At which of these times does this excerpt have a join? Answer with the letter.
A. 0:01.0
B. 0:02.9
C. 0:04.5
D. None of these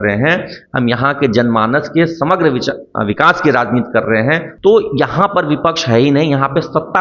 C